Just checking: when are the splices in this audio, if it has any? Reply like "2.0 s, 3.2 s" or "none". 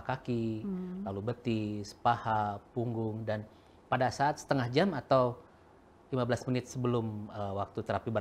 none